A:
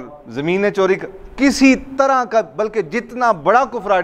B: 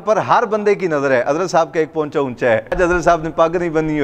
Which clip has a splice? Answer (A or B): B